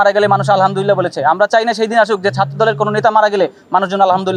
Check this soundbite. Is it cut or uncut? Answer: uncut